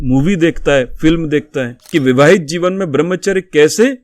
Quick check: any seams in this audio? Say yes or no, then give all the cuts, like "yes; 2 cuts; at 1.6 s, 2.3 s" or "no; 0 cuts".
yes; 1 cut; at 1.8 s